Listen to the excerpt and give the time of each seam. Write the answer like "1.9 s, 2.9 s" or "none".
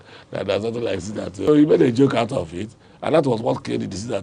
1.5 s